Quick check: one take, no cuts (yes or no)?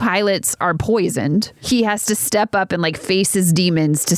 no